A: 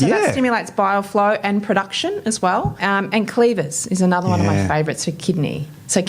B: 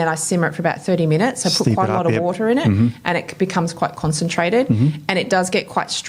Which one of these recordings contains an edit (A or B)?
A